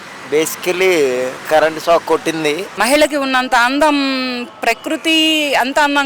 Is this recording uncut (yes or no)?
no